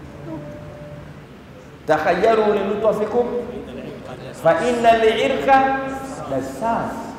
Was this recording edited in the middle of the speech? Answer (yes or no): yes